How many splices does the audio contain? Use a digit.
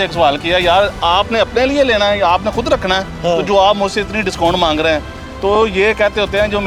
0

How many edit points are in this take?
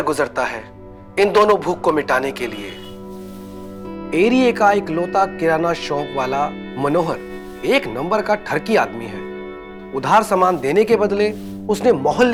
0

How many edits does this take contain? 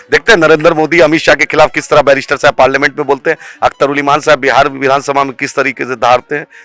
0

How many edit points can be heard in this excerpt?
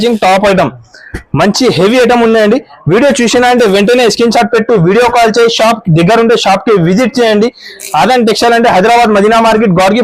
0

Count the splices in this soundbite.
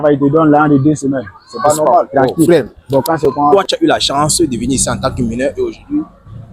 1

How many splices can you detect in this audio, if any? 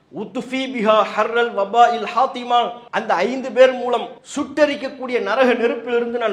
2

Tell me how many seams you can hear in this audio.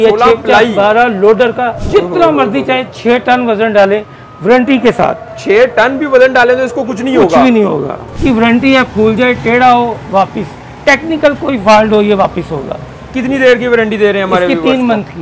1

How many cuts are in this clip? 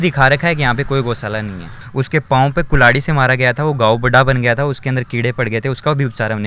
1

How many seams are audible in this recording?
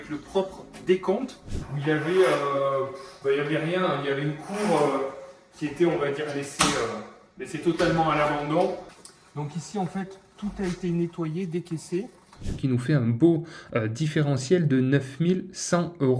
3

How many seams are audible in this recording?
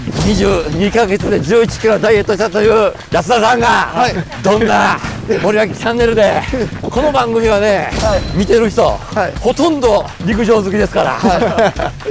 7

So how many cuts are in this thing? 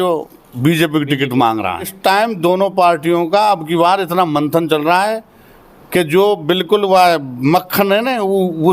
1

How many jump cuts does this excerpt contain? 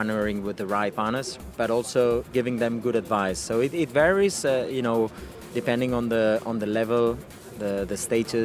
2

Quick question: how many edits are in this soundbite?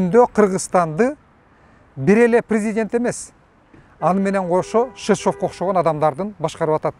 0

